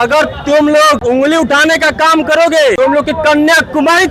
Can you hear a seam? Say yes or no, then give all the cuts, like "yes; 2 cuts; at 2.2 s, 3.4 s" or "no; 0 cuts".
yes; 2 cuts; at 1.0 s, 2.8 s